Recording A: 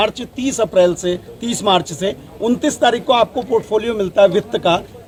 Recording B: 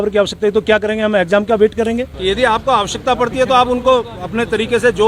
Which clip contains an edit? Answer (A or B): B